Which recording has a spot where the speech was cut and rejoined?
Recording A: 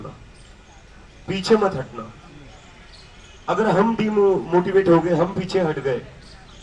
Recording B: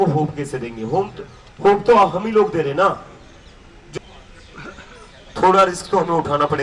B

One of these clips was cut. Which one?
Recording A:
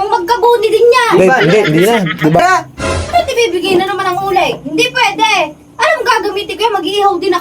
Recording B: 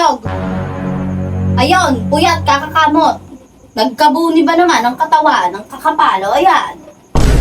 A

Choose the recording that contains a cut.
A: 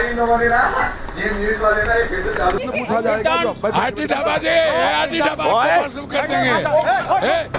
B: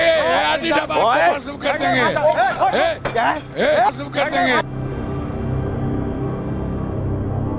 A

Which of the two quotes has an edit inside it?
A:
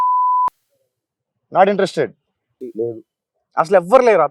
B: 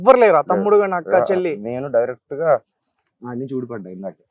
A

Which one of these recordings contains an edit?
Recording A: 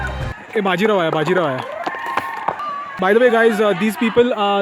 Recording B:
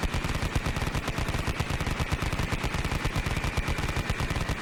A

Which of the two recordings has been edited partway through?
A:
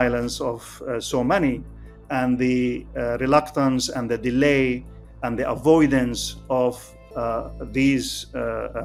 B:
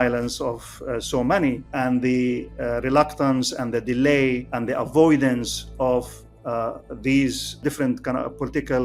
B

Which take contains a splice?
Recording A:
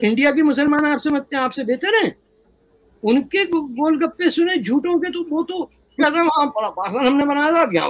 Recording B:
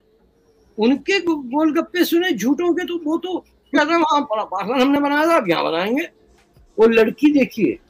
B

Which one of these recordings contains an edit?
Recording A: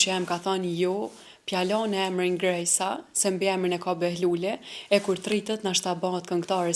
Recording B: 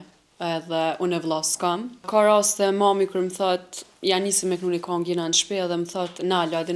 B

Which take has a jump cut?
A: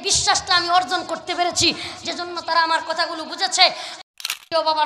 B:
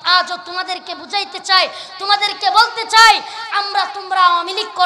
A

